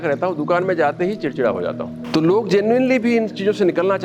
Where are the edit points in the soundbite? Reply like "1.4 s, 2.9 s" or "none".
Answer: 1.9 s